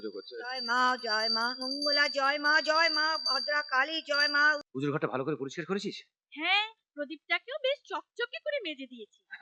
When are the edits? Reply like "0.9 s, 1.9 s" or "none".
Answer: 4.6 s